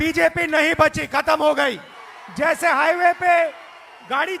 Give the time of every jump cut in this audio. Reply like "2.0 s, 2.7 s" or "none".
1.8 s